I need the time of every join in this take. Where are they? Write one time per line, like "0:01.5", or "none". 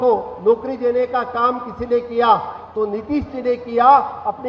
none